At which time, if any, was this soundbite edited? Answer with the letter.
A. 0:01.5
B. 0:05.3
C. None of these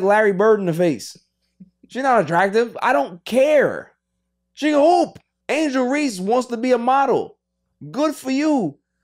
B